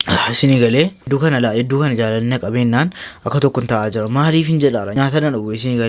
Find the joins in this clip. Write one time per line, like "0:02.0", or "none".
0:01.1
0:04.9